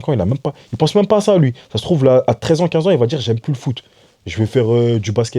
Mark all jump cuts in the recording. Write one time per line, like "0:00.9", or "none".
none